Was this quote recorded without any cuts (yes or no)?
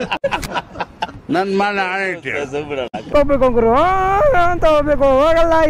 no